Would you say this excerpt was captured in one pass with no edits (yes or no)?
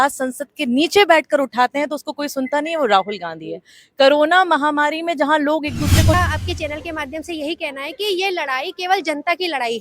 no